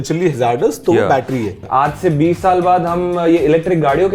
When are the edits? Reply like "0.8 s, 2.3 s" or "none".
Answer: 1.6 s